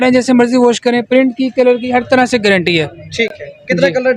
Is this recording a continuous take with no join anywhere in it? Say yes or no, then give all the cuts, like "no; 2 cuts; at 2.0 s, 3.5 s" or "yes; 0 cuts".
yes; 0 cuts